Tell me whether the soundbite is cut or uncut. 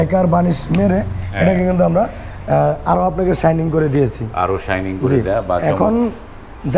uncut